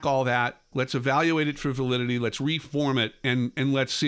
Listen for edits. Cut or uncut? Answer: uncut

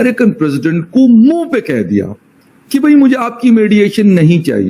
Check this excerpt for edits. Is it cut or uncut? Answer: uncut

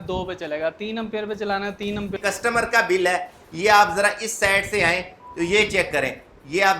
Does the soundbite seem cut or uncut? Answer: cut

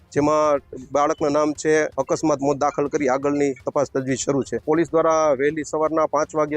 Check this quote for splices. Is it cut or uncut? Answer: cut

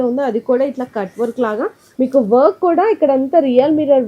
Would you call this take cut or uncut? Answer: cut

